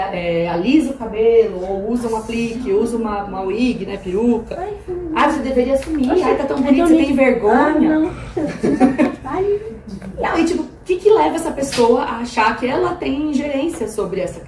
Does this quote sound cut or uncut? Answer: uncut